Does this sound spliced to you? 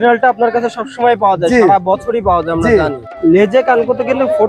yes; 1 cut; at 3.2 s

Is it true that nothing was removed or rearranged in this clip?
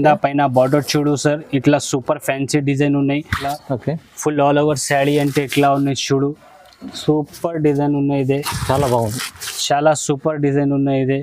no; 1 cut; at 3.6 s

